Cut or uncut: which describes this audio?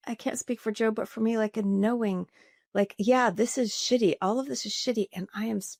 uncut